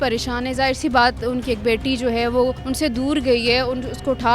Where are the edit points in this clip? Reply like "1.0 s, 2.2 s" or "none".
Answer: 2.6 s